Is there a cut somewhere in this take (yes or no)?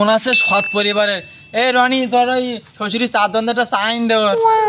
no